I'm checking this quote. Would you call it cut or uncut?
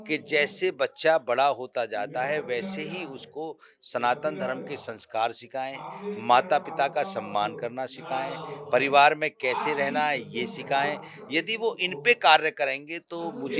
uncut